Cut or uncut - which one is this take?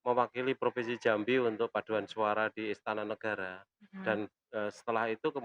uncut